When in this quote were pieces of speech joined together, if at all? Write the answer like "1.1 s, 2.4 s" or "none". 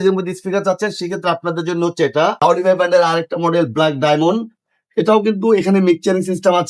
2.4 s

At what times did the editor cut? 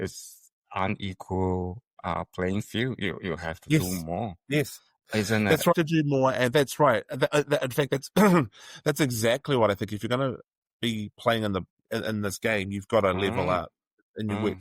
5.7 s

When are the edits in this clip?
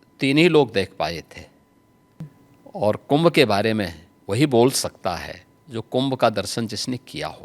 2.4 s

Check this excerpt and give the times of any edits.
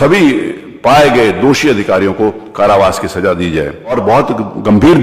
4.0 s

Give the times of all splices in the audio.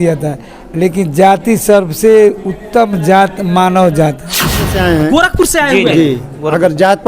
4.7 s

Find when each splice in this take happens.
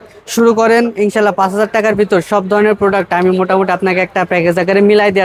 none

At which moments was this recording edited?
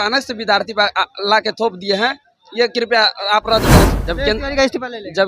3.9 s

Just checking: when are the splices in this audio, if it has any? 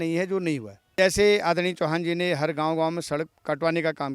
0.9 s

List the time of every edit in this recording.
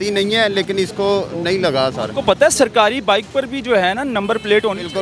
none

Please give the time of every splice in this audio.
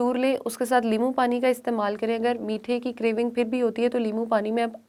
none

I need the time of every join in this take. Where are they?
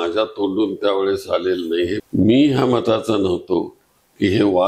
2.0 s

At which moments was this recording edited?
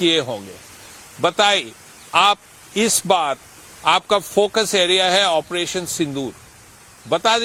none

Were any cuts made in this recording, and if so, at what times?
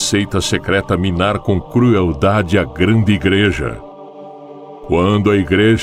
none

